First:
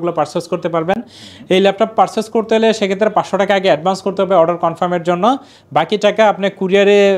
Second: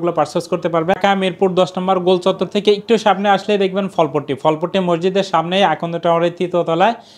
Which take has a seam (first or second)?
second